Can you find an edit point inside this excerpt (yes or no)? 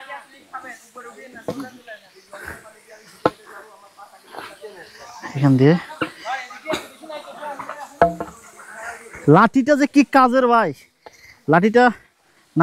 no